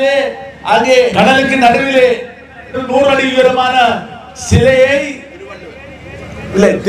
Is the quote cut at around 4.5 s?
no; 2 cuts; at 1.1 s, 2.8 s

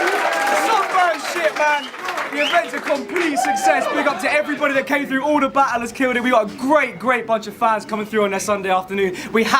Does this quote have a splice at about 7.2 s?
yes; 1 cut; at 7.2 s

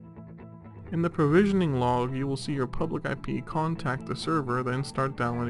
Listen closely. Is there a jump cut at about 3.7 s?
no; 1 cut; at 0.9 s

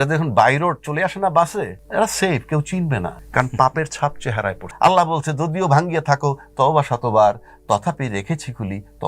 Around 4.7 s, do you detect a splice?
yes; 3 cuts; at 1.8 s, 3.2 s, 4.7 s

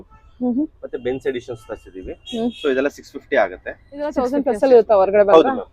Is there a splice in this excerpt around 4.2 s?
yes; 1 cut; at 4.2 s

